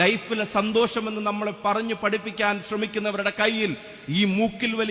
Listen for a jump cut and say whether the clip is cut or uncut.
uncut